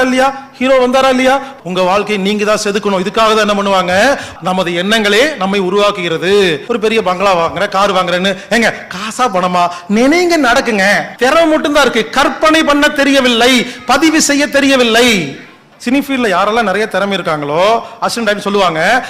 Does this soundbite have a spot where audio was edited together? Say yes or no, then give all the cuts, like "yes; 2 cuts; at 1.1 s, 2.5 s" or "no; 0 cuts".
yes; 5 cuts; at 1.5 s, 4.3 s, 6.6 s, 11.1 s, 15.7 s